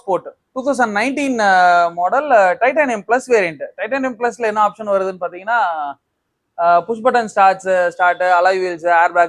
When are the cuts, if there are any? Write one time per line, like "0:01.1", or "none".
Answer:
none